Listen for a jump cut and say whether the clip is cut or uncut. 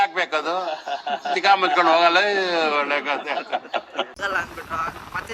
cut